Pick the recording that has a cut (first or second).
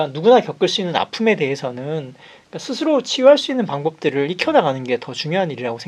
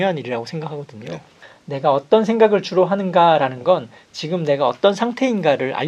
second